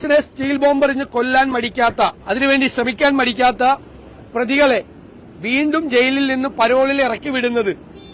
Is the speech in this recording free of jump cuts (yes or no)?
no